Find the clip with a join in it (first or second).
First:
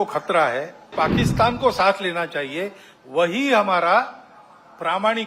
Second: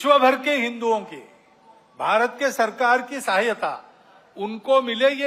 first